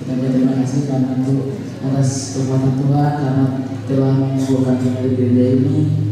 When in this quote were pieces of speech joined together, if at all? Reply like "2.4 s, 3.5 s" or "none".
none